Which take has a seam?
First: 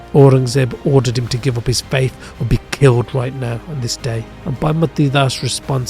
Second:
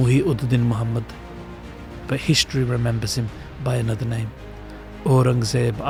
first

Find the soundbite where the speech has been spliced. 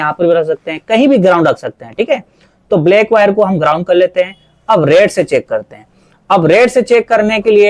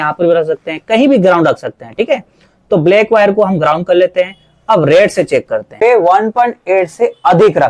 second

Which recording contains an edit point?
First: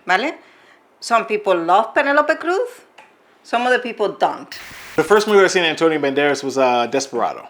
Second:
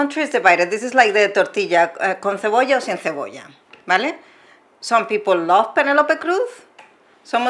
first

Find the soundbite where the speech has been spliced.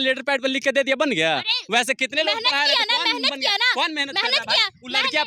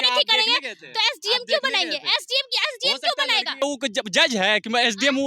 second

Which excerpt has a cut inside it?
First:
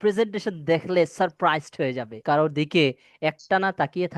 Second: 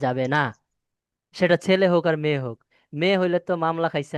first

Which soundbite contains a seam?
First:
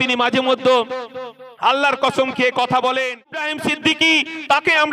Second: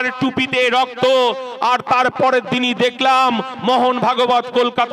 first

